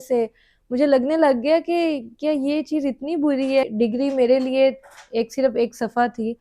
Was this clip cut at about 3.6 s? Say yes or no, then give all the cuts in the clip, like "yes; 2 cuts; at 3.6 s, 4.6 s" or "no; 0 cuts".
yes; 1 cut; at 3.6 s